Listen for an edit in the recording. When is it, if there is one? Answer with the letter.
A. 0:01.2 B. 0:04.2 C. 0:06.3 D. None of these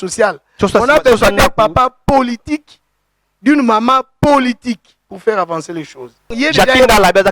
C